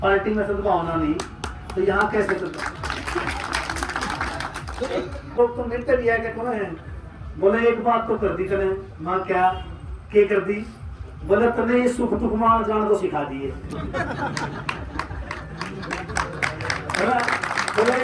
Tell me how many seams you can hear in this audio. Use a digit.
1